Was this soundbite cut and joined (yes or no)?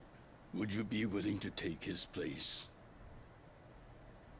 no